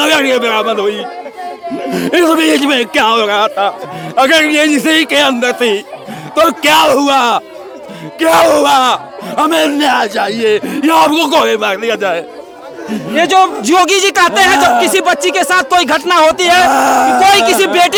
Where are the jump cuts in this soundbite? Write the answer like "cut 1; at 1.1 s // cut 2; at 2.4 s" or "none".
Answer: none